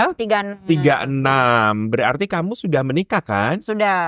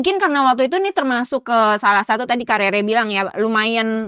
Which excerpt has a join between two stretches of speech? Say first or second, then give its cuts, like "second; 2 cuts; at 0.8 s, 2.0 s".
second; 1 cut; at 1.4 s